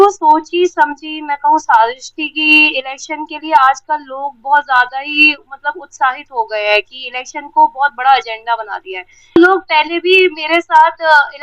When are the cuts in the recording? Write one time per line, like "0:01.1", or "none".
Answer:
0:09.3